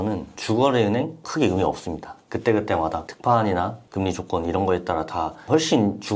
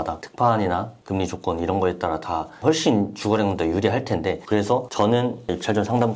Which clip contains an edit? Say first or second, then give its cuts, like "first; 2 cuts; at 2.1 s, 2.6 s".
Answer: second; 1 cut; at 4.4 s